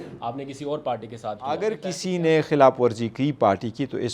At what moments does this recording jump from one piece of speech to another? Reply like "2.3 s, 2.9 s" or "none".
1.6 s